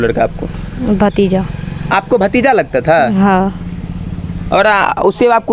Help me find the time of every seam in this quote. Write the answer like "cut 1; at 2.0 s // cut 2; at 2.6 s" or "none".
none